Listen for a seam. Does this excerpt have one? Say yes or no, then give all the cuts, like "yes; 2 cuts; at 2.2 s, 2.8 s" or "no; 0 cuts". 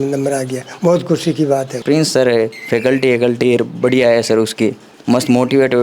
yes; 1 cut; at 1.7 s